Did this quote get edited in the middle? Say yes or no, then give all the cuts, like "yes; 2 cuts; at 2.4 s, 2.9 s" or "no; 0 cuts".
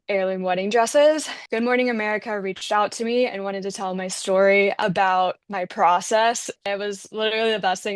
yes; 3 cuts; at 1.3 s, 4.8 s, 6.6 s